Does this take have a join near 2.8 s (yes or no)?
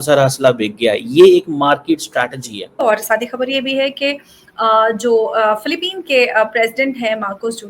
yes